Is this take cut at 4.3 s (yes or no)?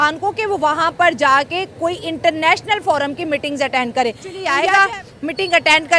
no